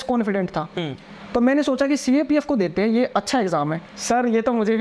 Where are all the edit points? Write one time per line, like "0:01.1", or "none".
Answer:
0:03.9